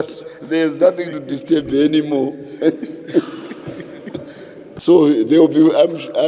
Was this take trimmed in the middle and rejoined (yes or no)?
yes